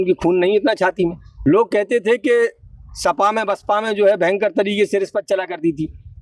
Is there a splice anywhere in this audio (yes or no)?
yes